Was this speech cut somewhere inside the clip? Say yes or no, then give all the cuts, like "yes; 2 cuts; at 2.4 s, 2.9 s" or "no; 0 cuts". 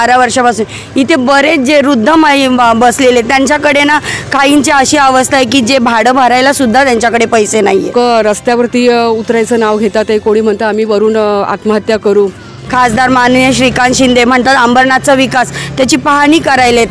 yes; 2 cuts; at 7.9 s, 12.6 s